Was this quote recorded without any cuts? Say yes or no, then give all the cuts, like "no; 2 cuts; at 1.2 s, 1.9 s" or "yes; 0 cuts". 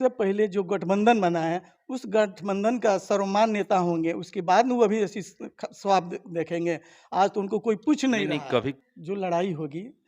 no; 1 cut; at 8.8 s